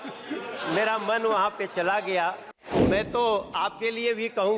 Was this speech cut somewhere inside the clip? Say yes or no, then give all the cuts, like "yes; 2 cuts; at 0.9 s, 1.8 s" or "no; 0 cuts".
yes; 1 cut; at 2.8 s